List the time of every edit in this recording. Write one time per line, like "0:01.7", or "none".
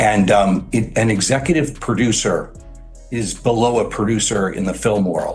none